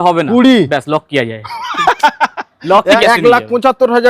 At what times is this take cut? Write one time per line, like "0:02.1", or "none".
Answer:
0:03.0